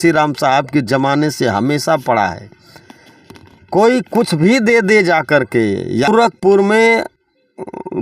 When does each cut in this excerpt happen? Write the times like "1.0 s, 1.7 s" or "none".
6.1 s

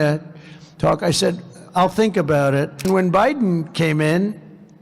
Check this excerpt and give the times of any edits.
2.9 s

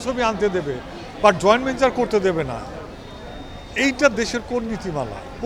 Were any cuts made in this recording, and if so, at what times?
none

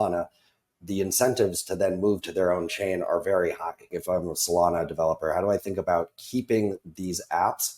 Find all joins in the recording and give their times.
3.9 s

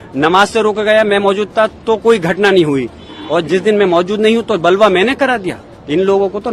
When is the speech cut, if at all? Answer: none

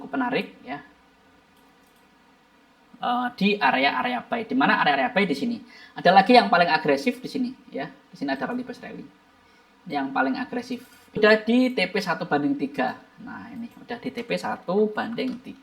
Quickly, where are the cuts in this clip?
2.8 s, 11.2 s

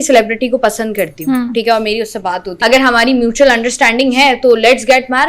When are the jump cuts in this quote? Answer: 2.5 s

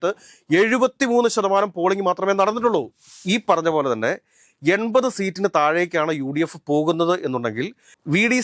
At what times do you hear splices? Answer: 3.1 s

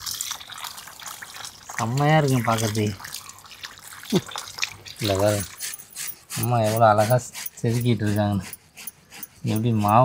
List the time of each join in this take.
4.8 s

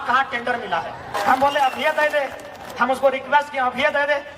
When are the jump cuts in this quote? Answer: 1.1 s

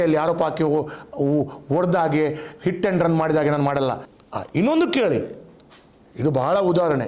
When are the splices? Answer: 4.1 s

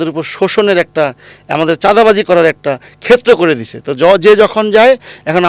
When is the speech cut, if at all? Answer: none

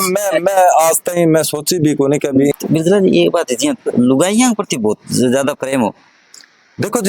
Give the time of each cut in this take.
2.5 s

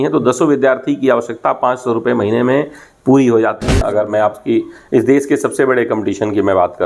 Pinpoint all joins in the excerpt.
3.7 s

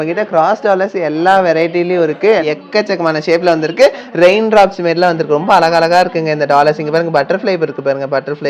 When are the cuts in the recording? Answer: 2.4 s

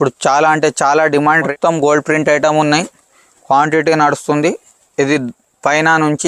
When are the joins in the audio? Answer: 1.5 s

